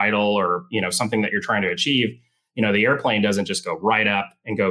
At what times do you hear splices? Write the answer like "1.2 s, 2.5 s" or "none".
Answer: none